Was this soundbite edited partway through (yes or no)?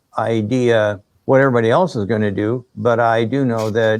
yes